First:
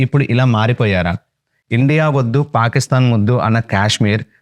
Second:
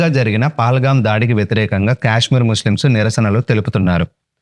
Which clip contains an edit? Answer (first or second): first